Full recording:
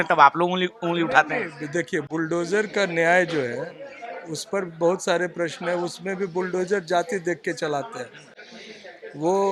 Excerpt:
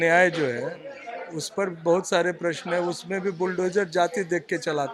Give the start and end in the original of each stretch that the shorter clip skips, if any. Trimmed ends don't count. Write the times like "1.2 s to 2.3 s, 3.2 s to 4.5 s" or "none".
none